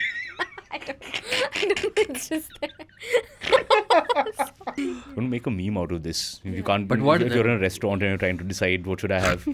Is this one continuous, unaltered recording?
no; 1 cut; at 4.7 s

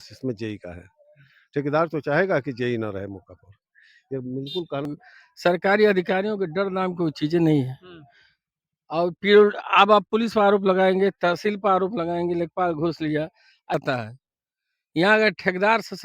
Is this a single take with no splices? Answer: no; 2 cuts; at 4.9 s, 13.7 s

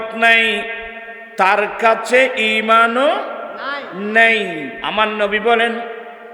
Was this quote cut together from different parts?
yes; 1 cut; at 4.7 s

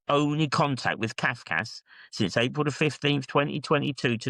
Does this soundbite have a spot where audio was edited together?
no; 0 cuts

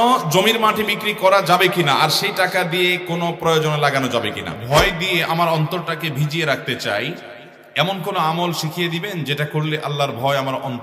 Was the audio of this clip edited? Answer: yes; 1 cut; at 4.5 s

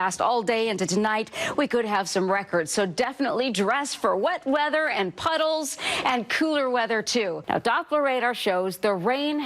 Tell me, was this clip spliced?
yes; 1 cut; at 7.4 s

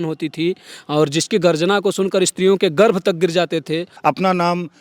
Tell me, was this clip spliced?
yes; 1 cut; at 3.9 s

